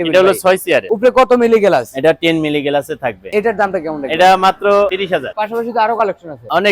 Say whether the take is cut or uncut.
uncut